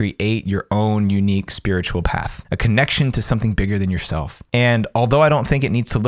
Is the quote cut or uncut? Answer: cut